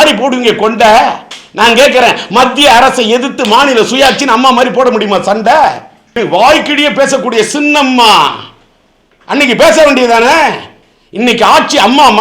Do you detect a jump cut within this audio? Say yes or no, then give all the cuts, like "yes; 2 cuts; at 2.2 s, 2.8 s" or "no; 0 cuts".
yes; 1 cut; at 6.0 s